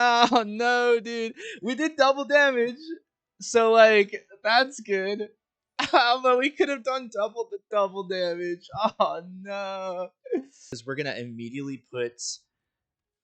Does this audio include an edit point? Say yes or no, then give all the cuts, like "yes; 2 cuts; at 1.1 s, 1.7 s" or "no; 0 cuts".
yes; 1 cut; at 10.8 s